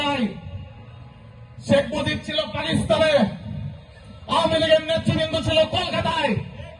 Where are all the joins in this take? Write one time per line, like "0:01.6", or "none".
none